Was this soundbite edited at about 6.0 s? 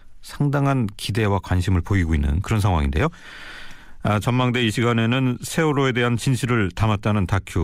yes; 1 cut; at 6.0 s

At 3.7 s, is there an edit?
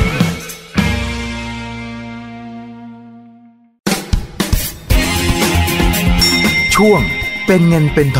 yes; 1 cut; at 3.7 s

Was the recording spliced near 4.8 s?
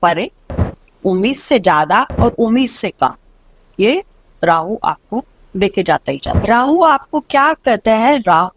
no; 1 cut; at 6.4 s

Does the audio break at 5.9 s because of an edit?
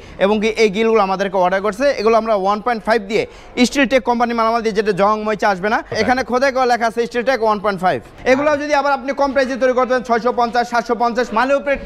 yes; 2 cuts; at 5.9 s, 8.1 s

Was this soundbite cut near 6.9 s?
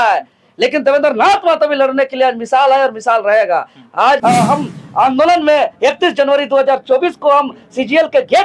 no; 1 cut; at 4.2 s

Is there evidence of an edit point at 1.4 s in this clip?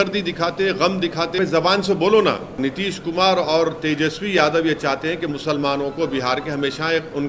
yes; 2 cuts; at 1.4 s, 2.6 s

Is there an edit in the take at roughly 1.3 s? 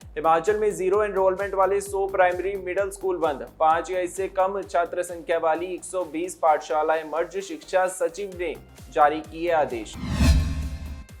no; 0 cuts

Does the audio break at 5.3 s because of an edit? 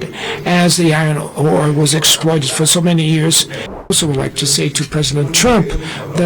no; 1 cut; at 3.9 s

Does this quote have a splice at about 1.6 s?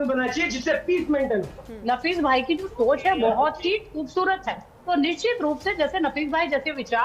yes; 2 cuts; at 1.6 s, 4.7 s

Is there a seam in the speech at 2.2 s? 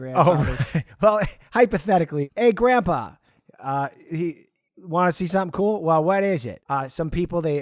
yes; 2 cuts; at 2.2 s, 6.6 s

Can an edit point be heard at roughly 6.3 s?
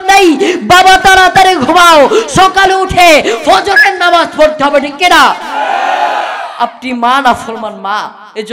no; 0 cuts

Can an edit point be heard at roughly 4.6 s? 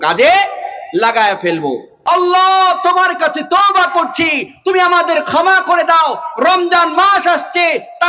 no; 1 cut; at 1.9 s

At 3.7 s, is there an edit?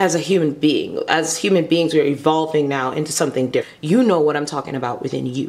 yes; 1 cut; at 3.7 s

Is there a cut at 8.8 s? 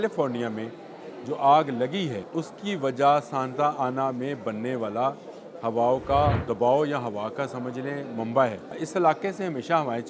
yes; 3 cuts; at 2.2 s, 6.4 s, 8.8 s

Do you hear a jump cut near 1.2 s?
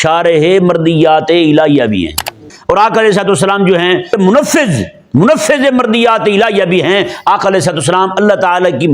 no; 2 cuts; at 2.5 s, 4.2 s

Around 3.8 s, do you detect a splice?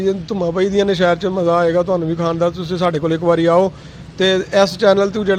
no; 0 cuts

